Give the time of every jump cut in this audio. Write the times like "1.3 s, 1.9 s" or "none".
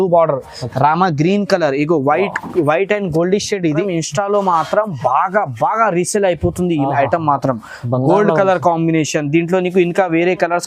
3.8 s

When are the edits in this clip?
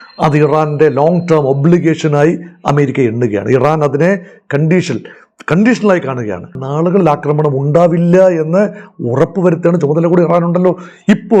6.6 s

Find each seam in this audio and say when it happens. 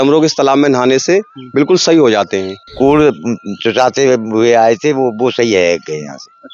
2.7 s

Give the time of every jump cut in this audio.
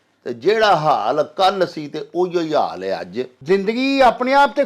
none

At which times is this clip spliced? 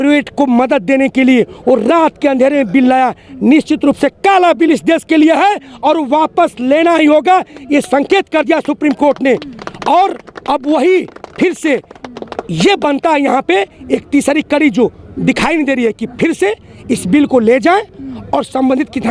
none

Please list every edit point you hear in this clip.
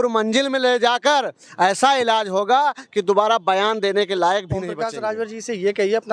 4.7 s

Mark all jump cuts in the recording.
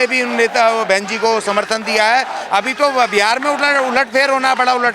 none

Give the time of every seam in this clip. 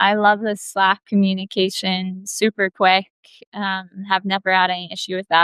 none

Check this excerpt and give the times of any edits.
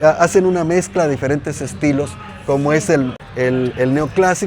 3.1 s

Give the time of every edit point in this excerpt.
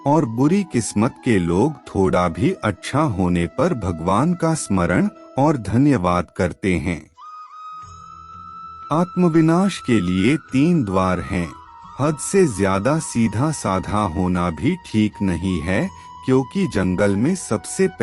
7.3 s, 8.9 s

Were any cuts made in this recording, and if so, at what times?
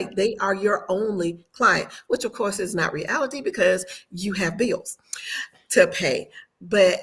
none

